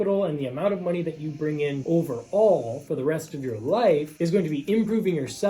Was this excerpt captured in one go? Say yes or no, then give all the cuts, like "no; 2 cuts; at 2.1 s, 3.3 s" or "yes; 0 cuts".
no; 1 cut; at 1.8 s